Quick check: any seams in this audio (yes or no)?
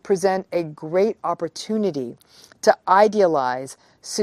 no